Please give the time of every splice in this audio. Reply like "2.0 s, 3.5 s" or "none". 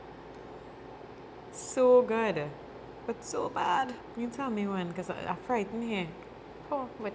4.0 s